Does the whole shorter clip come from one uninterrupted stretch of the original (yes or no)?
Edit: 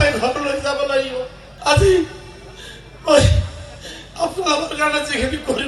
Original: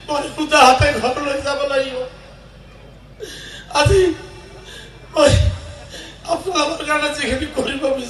no